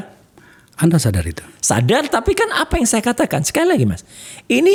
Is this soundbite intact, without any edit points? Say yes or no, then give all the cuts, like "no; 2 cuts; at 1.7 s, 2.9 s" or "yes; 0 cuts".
yes; 0 cuts